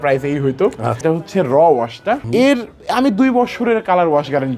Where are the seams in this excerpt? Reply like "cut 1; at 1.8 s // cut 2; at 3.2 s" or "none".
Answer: cut 1; at 1.0 s // cut 2; at 2.3 s